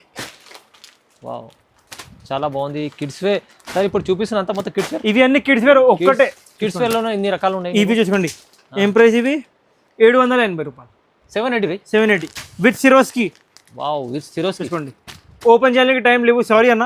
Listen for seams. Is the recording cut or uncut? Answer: uncut